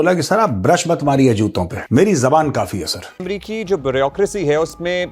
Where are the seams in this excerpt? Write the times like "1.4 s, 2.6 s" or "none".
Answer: 1.7 s, 3.2 s